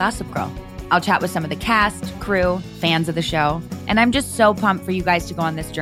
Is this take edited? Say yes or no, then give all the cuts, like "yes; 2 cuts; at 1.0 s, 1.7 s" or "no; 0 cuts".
no; 0 cuts